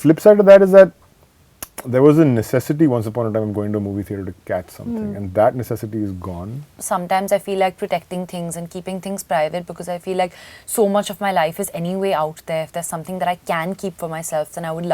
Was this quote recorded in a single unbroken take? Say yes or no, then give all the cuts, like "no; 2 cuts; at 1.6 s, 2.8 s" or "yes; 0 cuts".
no; 1 cut; at 6.8 s